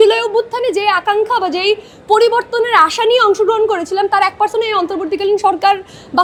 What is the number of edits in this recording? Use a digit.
0